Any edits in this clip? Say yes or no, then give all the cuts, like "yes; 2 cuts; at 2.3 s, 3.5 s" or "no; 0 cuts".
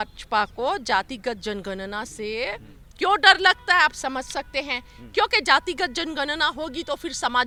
no; 0 cuts